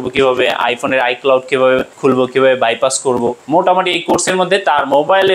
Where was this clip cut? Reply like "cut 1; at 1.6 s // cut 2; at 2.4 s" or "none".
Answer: cut 1; at 1.9 s // cut 2; at 3.4 s